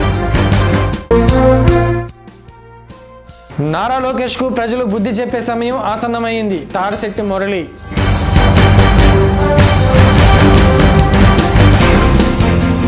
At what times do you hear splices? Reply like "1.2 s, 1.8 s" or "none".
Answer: 1.0 s